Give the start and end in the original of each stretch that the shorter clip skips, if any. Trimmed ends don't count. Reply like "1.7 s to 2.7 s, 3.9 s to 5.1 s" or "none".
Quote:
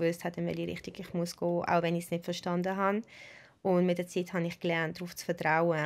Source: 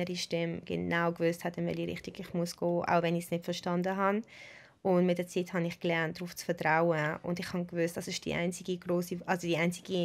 none